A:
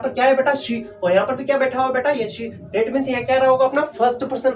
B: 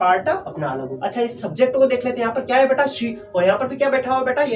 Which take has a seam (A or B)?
B